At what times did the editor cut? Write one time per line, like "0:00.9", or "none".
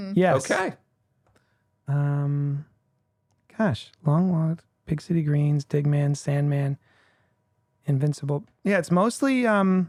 none